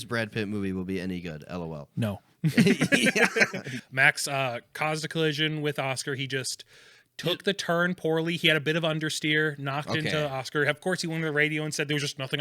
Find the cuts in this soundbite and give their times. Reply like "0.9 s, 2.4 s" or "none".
3.7 s